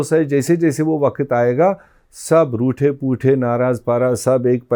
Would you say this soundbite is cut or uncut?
uncut